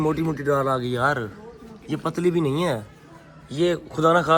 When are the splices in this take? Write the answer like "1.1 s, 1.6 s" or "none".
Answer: none